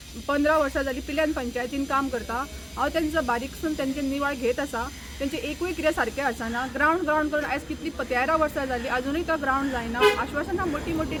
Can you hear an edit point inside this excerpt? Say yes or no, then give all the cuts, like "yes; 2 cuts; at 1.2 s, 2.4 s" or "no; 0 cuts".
no; 0 cuts